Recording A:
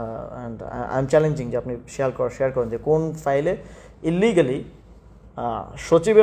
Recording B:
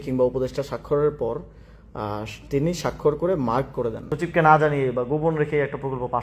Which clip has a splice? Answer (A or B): B